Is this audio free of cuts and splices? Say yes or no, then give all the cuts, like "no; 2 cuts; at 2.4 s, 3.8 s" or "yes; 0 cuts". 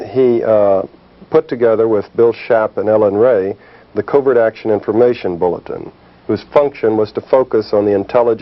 no; 1 cut; at 1.3 s